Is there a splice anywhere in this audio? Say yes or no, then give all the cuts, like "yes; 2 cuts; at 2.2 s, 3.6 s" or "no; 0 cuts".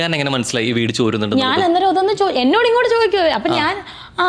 no; 0 cuts